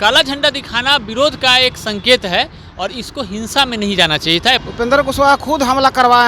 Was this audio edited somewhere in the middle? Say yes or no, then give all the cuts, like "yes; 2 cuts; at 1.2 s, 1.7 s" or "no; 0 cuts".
yes; 1 cut; at 4.6 s